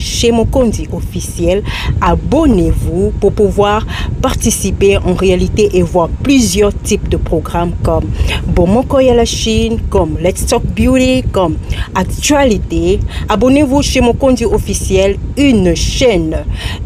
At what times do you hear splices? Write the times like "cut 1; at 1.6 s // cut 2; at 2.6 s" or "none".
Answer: none